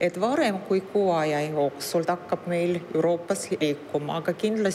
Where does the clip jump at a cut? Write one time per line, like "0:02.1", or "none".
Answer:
0:02.0
0:03.6